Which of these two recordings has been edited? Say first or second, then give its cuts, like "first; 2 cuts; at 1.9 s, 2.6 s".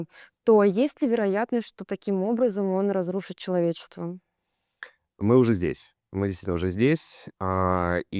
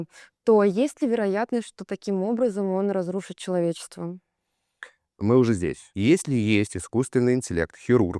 second; 1 cut; at 5.8 s